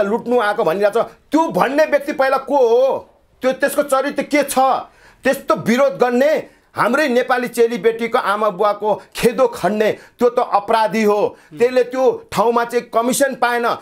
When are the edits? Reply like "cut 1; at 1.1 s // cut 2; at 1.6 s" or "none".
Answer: none